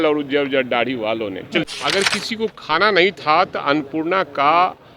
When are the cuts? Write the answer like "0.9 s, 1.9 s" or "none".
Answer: 1.6 s